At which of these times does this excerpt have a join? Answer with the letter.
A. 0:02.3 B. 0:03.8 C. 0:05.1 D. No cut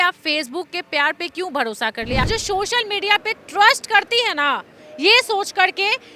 A